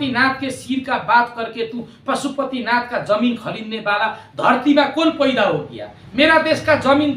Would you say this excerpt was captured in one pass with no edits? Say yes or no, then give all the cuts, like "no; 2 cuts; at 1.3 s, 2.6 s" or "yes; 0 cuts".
yes; 0 cuts